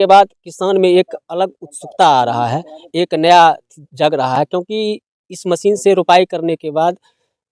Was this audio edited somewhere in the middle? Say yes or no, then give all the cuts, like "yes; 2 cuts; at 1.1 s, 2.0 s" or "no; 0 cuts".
no; 0 cuts